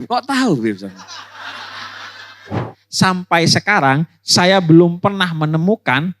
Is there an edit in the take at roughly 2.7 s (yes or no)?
yes